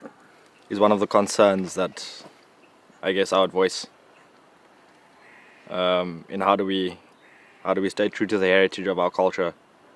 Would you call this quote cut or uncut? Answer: cut